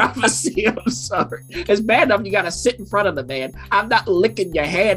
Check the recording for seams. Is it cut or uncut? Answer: cut